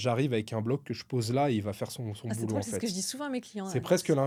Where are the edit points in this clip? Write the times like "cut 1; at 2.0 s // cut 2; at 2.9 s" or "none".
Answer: none